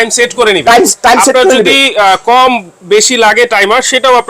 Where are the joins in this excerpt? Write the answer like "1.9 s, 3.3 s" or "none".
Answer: none